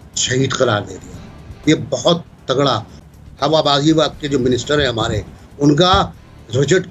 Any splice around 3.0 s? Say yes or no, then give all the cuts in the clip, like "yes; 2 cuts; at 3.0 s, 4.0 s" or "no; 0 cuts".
yes; 1 cut; at 3.0 s